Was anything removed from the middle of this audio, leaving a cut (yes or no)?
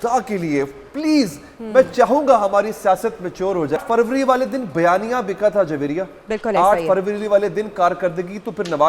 yes